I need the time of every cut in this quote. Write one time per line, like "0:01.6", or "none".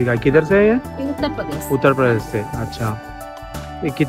none